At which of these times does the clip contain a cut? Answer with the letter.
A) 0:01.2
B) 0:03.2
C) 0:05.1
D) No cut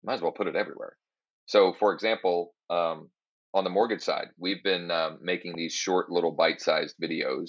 D